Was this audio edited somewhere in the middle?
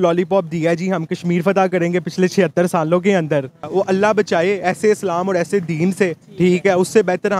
yes; 1 cut; at 3.7 s

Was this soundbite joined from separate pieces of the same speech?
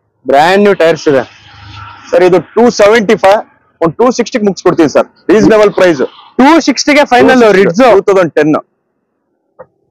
no; 0 cuts

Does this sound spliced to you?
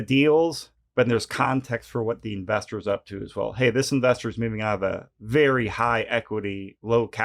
yes; 1 cut; at 1.5 s

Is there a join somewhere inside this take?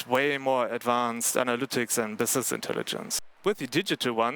yes; 1 cut; at 3.3 s

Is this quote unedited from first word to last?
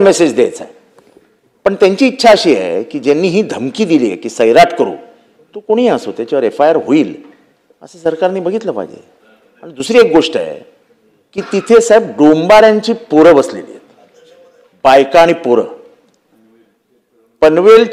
yes; 0 cuts

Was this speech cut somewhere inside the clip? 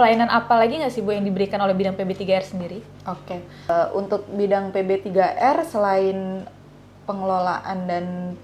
no; 0 cuts

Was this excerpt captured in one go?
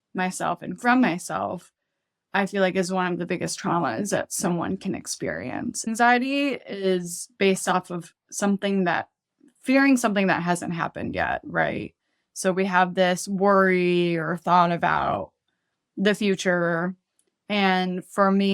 no; 1 cut; at 5.8 s

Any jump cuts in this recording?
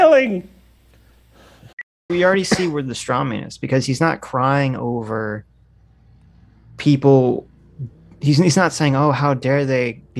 yes; 1 cut; at 2.1 s

